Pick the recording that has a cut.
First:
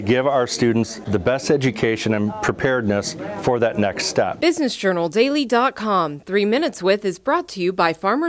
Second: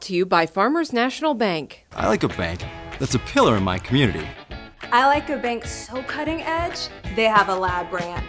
first; 2 cuts; at 1.0 s, 4.4 s

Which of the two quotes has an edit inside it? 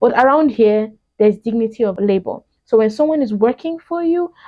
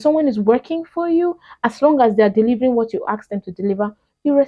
first; 1 cut; at 1.9 s

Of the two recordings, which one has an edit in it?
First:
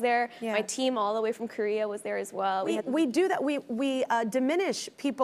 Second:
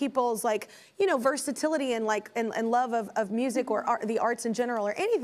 first; 1 cut; at 2.8 s

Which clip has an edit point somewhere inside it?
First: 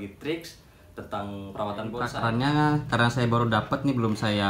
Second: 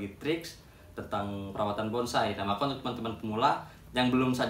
first; 1 cut; at 2.1 s

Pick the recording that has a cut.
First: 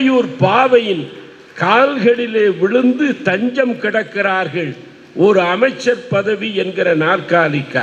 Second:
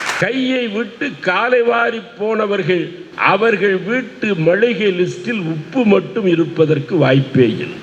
second; 1 cut; at 3.0 s

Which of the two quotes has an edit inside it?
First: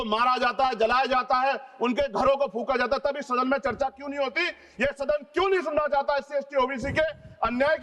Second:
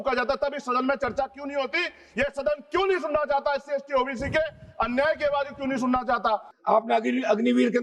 second; 1 cut; at 6.5 s

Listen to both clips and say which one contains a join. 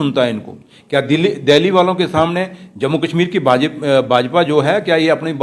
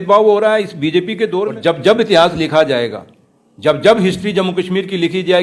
second; 1 cut; at 1.6 s

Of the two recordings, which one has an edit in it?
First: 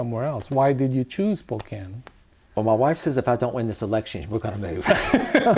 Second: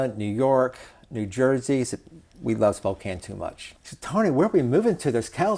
second; 1 cut; at 3.7 s

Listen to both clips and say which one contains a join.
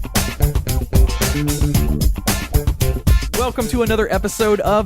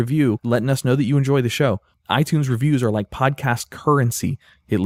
first; 1 cut; at 3.7 s

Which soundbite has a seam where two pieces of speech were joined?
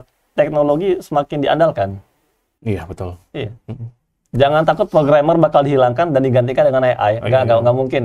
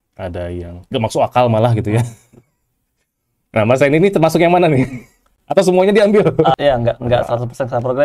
second; 1 cut; at 6.5 s

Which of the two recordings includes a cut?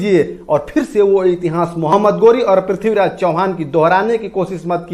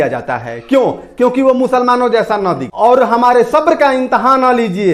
second; 1 cut; at 2.6 s

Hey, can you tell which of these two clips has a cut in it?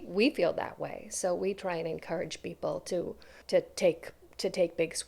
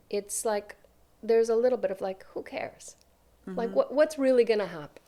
first; 1 cut; at 3.3 s

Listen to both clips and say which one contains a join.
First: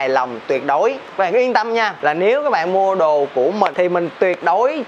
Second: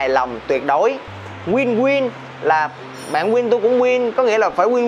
first; 3 cuts; at 1.0 s, 1.9 s, 3.7 s

